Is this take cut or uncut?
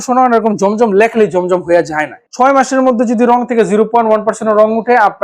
cut